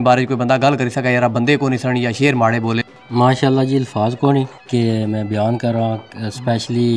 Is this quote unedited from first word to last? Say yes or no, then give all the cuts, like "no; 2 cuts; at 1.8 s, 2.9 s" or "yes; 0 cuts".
no; 2 cuts; at 2.9 s, 4.6 s